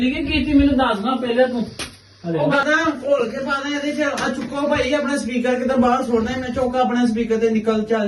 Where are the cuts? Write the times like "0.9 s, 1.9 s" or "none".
2.5 s